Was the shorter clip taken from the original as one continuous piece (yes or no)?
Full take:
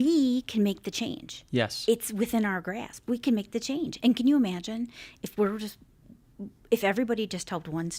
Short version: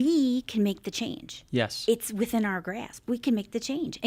yes